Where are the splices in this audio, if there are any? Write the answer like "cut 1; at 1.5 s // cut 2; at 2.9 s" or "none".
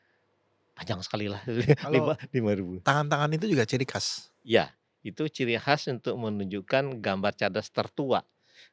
cut 1; at 2.7 s